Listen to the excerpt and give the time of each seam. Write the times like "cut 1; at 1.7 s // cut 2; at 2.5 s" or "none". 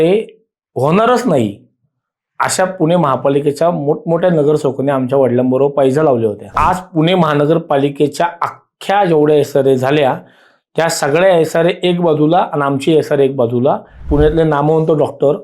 cut 1; at 6.5 s // cut 2; at 13.9 s